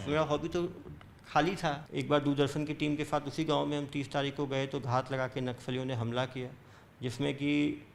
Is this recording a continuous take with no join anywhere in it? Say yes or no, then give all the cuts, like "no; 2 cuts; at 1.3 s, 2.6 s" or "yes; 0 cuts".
no; 1 cut; at 1.8 s